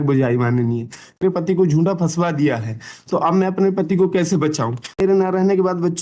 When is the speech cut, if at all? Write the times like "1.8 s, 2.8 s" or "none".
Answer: 1.2 s, 5.0 s